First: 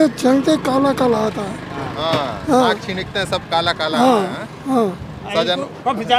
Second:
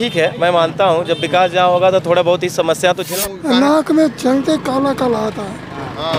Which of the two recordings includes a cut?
second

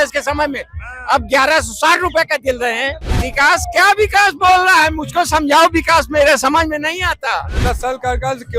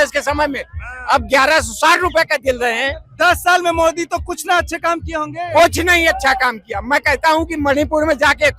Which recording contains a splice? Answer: first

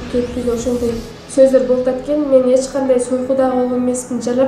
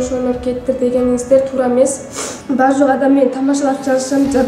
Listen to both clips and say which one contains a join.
second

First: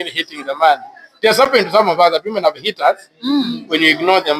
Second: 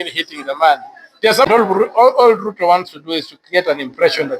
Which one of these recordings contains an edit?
second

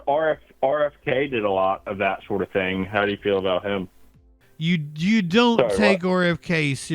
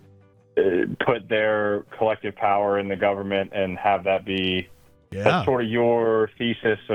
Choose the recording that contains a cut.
first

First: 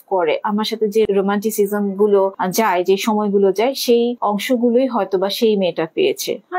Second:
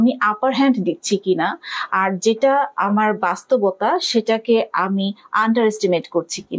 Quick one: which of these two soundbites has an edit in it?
first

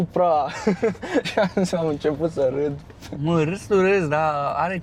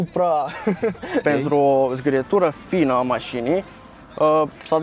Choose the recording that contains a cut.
second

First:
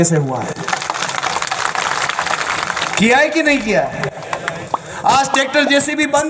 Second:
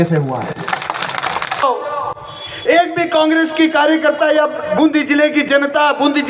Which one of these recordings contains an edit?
second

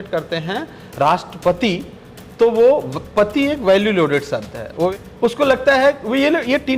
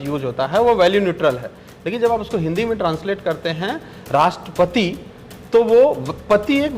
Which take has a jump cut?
first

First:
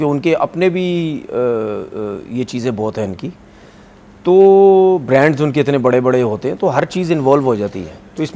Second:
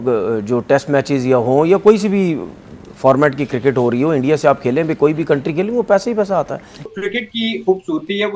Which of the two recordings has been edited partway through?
second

